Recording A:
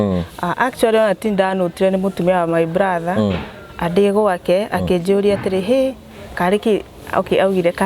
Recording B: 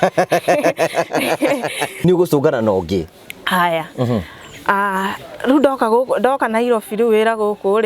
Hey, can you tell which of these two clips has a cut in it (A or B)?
B